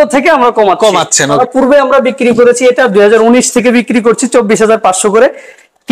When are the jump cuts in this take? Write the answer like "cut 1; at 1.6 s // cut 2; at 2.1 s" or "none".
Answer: cut 1; at 1.4 s